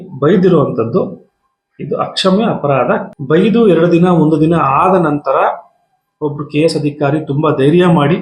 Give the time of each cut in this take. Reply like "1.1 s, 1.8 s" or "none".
3.1 s